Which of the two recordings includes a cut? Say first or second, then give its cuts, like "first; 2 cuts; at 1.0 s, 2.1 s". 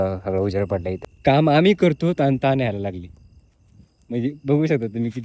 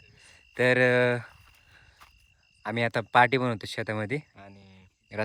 first; 1 cut; at 1.0 s